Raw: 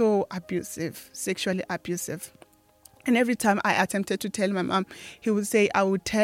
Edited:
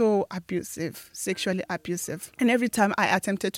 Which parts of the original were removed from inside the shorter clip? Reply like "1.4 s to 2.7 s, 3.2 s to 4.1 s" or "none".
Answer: 2.3 s to 2.9 s